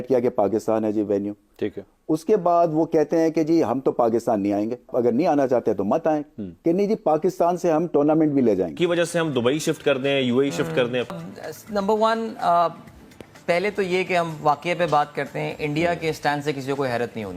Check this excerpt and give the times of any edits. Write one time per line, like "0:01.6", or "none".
0:04.9
0:08.8